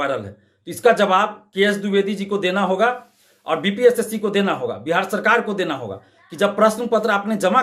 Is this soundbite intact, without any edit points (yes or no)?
yes